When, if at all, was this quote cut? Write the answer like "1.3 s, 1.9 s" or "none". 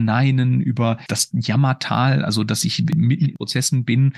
1.1 s, 2.9 s